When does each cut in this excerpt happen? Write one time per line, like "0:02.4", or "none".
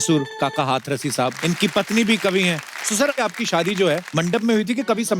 0:01.3
0:03.2
0:04.1